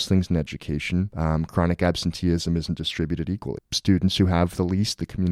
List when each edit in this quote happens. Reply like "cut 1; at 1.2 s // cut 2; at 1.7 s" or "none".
cut 1; at 1.1 s // cut 2; at 3.7 s